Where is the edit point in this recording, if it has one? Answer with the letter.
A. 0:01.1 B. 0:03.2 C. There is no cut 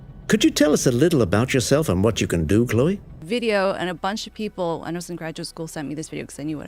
C